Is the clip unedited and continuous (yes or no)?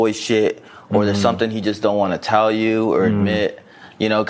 yes